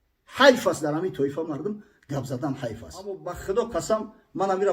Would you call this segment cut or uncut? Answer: cut